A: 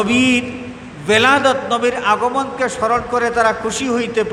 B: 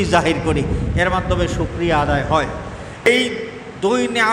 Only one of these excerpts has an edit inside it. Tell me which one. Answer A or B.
B